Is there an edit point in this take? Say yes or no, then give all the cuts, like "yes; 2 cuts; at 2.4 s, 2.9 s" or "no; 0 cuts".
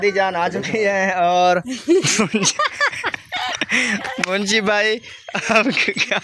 no; 0 cuts